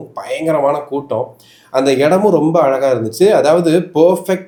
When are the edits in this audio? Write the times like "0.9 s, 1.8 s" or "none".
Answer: none